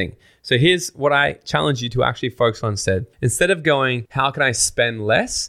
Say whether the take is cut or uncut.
cut